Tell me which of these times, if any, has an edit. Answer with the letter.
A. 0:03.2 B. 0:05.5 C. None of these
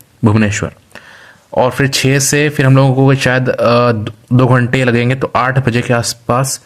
C